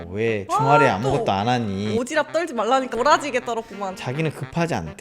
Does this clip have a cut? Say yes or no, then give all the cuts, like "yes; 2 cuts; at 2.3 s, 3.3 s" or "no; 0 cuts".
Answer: yes; 2 cuts; at 2.9 s, 4.0 s